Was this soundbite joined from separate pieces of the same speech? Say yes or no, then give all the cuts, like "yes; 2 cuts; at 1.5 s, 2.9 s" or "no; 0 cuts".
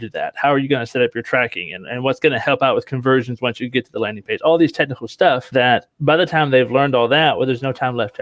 yes; 1 cut; at 5.4 s